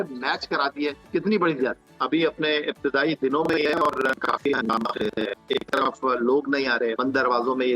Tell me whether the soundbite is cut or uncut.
cut